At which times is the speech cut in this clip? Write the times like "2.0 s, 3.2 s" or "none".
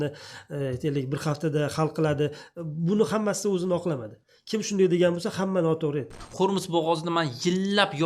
6.2 s